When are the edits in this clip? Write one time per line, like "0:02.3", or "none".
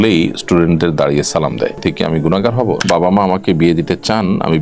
0:02.9